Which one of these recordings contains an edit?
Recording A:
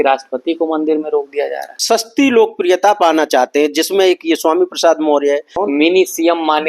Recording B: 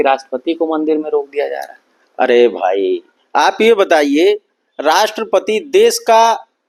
A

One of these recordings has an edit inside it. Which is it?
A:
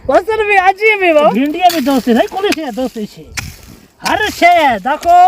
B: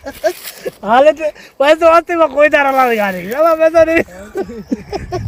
A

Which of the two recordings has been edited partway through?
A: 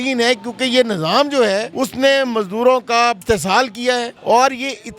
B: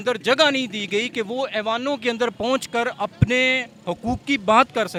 A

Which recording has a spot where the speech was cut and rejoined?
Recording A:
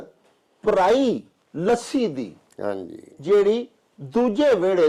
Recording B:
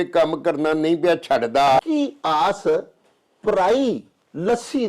B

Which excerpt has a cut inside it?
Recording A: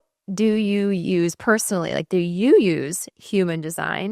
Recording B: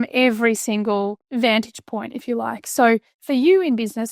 B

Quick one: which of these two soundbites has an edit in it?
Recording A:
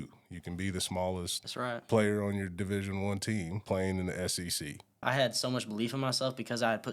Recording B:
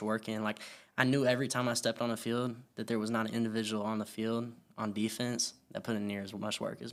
A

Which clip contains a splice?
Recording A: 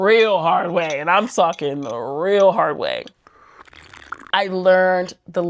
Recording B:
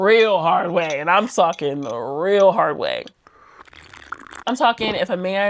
A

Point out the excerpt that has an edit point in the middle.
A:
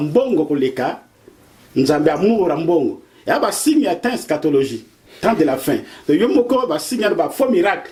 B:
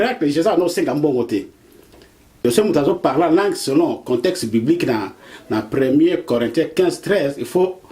B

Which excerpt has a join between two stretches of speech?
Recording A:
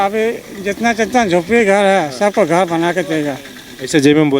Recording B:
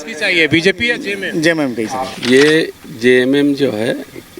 B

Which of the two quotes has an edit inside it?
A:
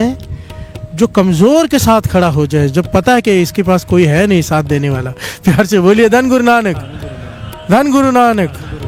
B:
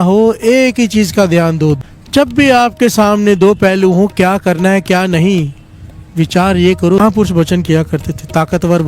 B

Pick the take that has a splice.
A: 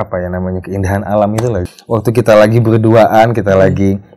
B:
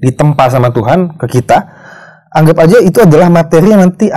A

